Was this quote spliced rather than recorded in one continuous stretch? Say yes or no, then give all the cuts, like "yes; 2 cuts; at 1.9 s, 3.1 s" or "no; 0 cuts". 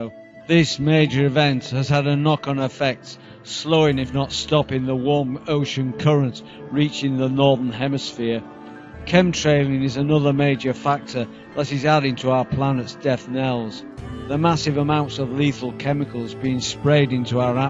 no; 0 cuts